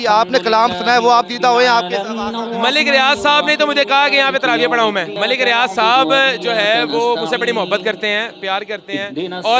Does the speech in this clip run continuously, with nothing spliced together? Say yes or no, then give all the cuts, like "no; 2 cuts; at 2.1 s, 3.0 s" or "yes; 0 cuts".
no; 1 cut; at 5.1 s